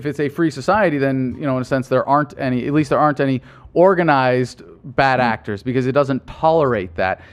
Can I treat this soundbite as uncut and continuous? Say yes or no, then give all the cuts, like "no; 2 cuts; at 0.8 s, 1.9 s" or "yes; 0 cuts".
no; 1 cut; at 6.3 s